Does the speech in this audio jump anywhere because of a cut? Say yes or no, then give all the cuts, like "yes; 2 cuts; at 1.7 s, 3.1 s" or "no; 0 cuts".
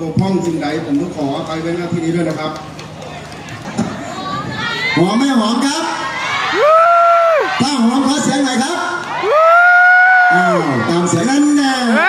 yes; 1 cut; at 3.7 s